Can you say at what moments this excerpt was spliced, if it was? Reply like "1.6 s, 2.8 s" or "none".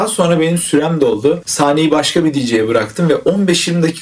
1.5 s